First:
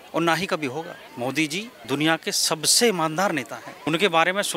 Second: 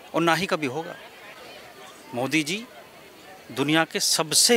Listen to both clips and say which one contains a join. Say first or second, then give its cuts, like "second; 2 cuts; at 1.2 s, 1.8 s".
first; 3 cuts; at 1.0 s, 1.7 s, 3.7 s